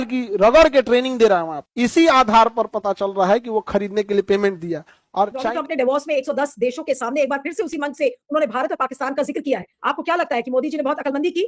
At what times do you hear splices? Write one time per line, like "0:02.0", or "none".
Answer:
0:05.3